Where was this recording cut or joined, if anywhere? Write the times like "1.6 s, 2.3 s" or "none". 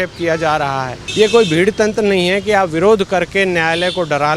1.0 s